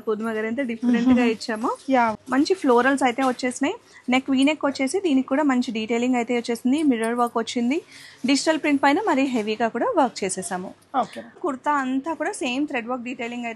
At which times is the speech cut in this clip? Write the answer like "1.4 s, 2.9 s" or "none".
2.2 s, 11.4 s

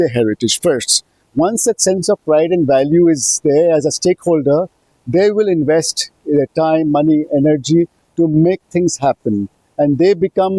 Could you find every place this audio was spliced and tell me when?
none

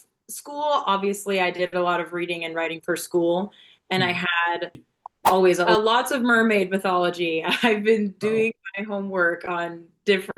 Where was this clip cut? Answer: 5.7 s

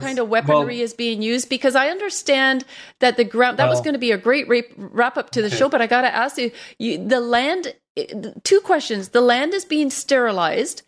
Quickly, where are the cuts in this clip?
none

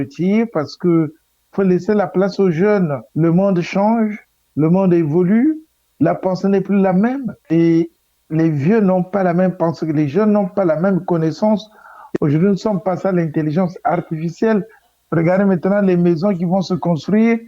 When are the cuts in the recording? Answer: 7.3 s

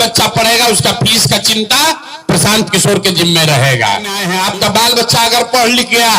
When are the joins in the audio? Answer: 4.2 s

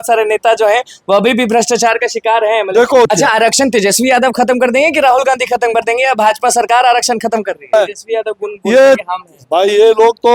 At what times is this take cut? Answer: 3.1 s, 7.7 s

